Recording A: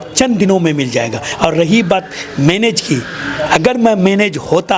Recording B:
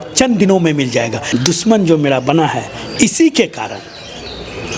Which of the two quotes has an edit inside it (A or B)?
B